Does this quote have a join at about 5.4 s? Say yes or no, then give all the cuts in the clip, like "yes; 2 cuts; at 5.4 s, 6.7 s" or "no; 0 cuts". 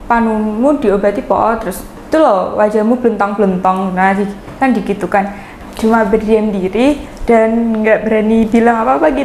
yes; 2 cuts; at 2.0 s, 5.4 s